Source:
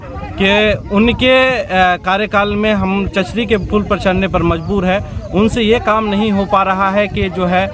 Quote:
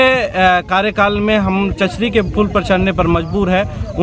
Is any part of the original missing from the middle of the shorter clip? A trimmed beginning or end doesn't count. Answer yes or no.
no